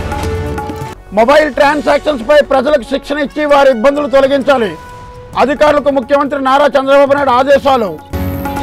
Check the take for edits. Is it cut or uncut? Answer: cut